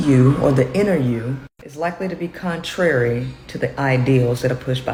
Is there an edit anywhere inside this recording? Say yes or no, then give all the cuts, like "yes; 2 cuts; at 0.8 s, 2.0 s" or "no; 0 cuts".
no; 0 cuts